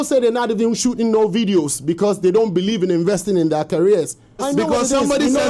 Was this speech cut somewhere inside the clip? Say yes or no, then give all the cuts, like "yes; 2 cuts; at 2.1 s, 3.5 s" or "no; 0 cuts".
yes; 1 cut; at 4.4 s